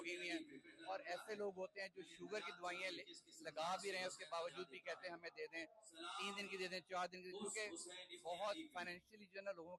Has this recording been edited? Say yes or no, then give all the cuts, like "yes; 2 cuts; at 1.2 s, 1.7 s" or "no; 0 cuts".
no; 0 cuts